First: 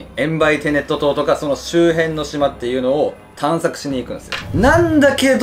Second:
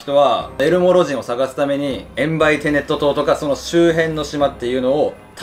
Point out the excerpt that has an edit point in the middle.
first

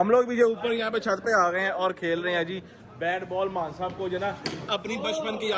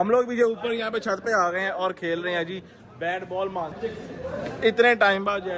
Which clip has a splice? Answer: second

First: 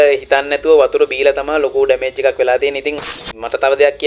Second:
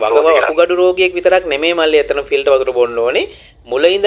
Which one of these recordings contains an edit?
first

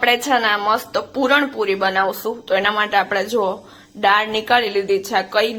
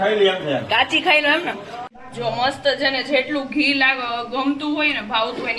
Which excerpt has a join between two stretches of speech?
second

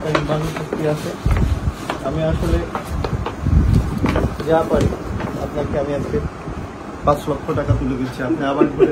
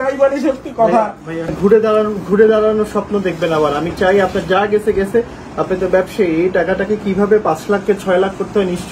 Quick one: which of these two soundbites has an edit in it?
second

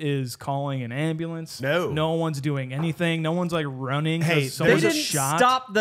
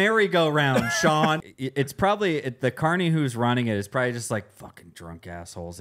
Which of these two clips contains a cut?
second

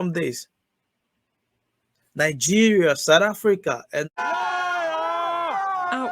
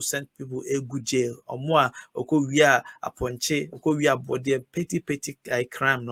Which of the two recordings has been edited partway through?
first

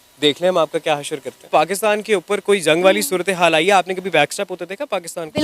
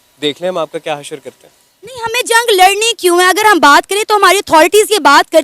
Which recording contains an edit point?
first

